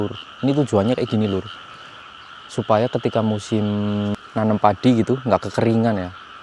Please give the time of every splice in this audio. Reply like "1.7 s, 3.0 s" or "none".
4.2 s